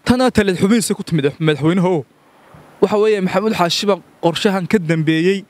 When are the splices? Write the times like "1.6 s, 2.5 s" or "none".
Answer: none